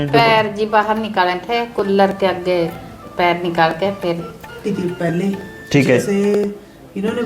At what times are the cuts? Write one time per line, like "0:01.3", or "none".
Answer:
0:04.6